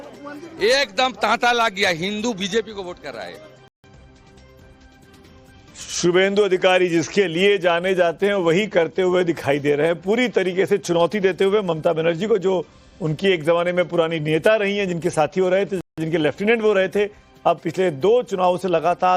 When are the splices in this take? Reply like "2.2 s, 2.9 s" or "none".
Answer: 1.6 s